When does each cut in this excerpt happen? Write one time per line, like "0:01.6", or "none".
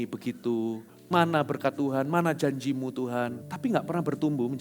0:00.9
0:03.4

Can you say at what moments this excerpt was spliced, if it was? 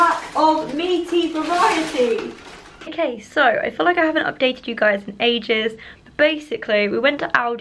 none

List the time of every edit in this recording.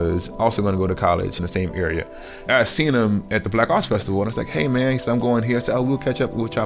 0:02.4

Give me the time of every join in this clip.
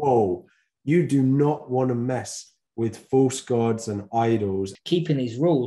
0:04.8

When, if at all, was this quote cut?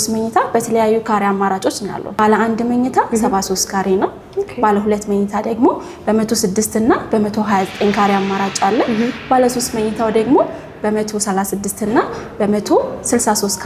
none

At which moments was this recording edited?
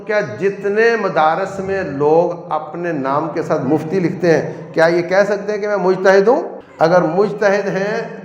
0:06.6

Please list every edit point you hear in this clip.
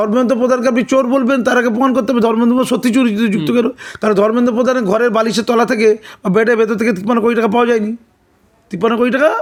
none

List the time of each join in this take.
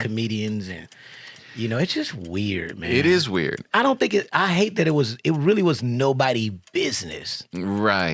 0:03.6

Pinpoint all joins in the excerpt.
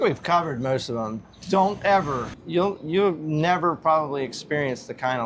0:02.3

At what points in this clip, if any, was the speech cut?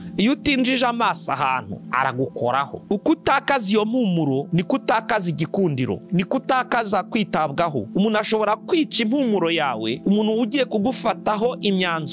0:02.8
0:07.8

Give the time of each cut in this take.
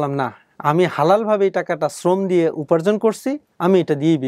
none

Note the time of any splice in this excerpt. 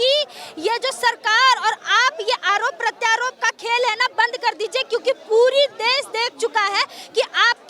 none

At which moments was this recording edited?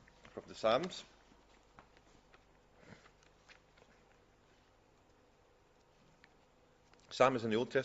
0:04.4

